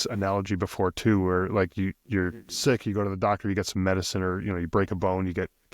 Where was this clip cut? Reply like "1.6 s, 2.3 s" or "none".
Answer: none